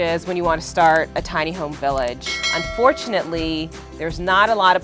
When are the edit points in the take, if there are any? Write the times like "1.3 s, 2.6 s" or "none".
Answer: 2.3 s